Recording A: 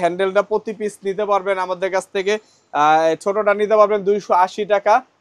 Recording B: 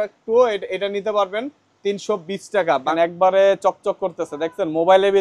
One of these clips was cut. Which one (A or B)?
B